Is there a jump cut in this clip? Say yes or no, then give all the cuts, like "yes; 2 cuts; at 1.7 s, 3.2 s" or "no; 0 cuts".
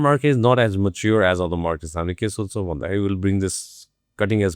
no; 0 cuts